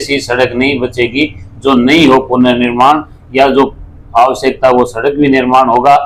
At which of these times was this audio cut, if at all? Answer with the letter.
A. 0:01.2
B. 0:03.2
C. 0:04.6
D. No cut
D